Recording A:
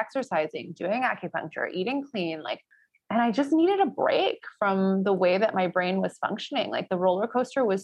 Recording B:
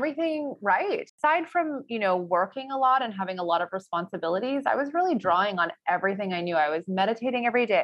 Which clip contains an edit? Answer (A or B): B